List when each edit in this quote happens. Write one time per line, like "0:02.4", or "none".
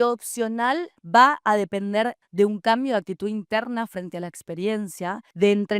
0:02.2